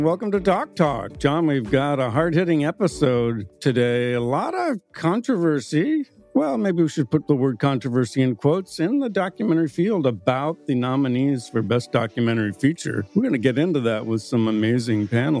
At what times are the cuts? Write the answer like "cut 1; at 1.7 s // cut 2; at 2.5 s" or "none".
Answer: none